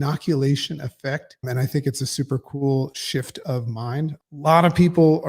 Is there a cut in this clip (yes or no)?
yes